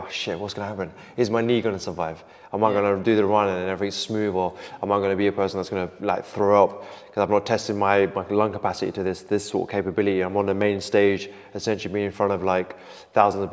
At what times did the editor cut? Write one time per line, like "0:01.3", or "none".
none